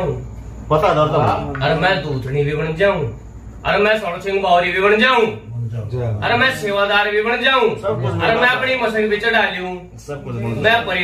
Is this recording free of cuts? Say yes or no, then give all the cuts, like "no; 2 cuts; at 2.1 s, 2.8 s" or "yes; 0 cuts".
yes; 0 cuts